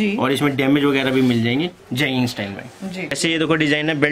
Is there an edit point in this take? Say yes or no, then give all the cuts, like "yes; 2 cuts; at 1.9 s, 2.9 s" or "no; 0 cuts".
yes; 1 cut; at 3.2 s